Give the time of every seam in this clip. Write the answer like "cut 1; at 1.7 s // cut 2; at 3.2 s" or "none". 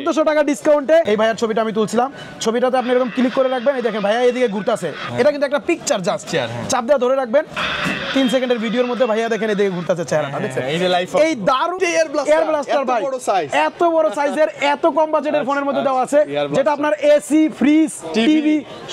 cut 1; at 1.1 s // cut 2; at 11.8 s